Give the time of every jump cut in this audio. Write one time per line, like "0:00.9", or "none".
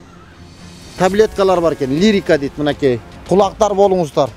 0:03.1

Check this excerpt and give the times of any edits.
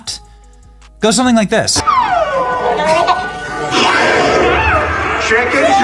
0:01.8

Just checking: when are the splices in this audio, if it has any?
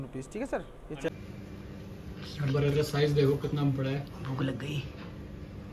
0:01.1

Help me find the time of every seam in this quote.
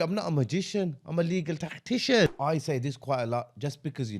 0:02.3

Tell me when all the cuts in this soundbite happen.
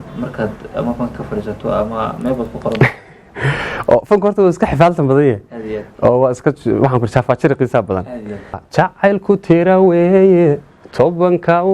0:08.6

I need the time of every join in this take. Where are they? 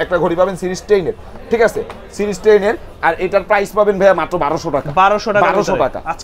none

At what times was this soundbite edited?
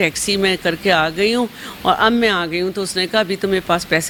none

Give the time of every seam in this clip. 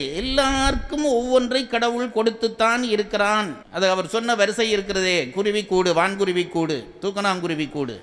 none

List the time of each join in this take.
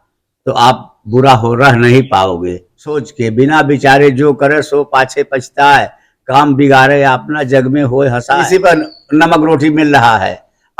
0:03.1
0:08.4

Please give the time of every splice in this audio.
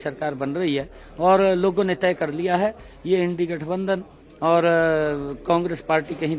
none

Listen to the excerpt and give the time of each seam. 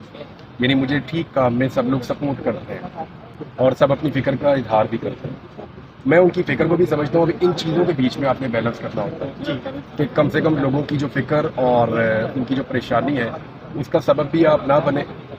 none

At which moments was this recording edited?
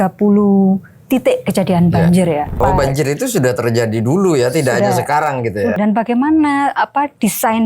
0:02.6
0:05.8

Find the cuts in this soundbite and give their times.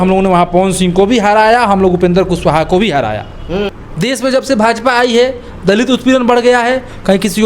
0:03.6

